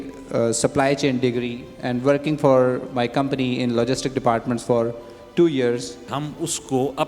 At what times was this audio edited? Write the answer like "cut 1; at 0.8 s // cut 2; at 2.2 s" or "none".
cut 1; at 6.1 s